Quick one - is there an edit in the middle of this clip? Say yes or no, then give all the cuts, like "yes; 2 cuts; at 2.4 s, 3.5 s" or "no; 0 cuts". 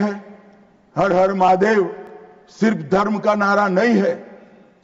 no; 0 cuts